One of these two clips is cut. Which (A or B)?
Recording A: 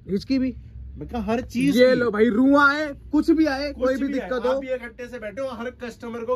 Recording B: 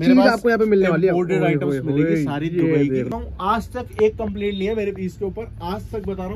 B